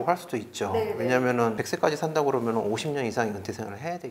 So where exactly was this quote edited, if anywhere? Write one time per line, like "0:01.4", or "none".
0:01.6